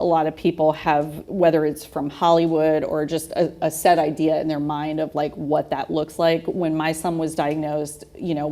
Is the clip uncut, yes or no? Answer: no